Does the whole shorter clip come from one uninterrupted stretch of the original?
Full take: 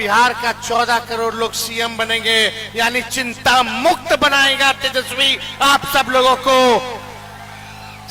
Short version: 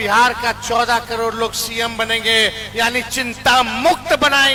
yes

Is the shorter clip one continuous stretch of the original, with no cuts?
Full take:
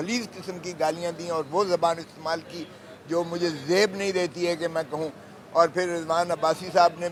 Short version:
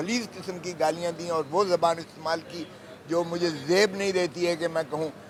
yes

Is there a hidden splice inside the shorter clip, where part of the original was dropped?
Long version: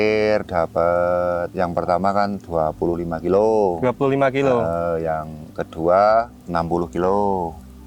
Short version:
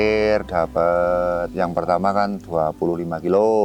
no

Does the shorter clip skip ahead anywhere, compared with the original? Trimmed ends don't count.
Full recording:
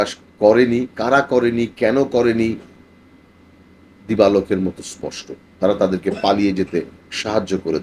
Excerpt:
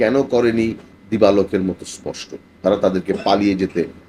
yes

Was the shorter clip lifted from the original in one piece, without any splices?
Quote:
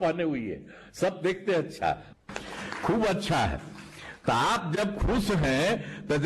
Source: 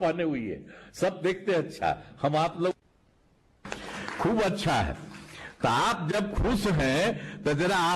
no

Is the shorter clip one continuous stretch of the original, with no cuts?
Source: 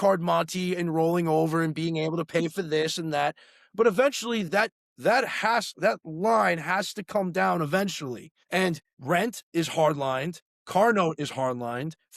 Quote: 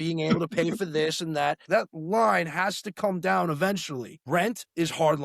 no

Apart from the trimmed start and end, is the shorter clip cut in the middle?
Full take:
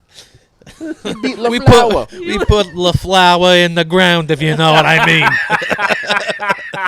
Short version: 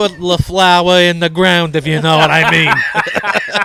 no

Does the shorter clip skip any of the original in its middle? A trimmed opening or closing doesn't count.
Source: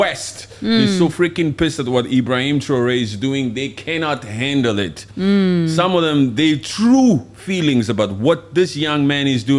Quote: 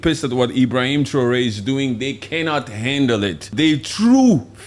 yes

